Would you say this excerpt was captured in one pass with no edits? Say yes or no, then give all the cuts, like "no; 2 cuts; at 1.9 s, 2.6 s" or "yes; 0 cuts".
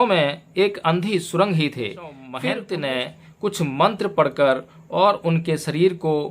no; 1 cut; at 2.2 s